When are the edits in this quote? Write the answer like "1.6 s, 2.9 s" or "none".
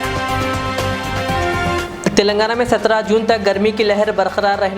1.8 s